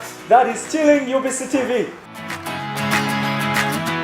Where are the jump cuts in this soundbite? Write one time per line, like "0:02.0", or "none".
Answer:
0:02.1